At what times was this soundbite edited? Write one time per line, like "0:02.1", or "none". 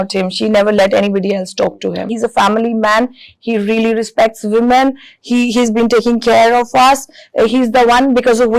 0:02.1